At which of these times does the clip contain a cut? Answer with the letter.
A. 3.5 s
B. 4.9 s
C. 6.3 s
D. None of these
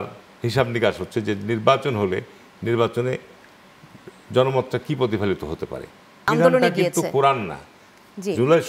C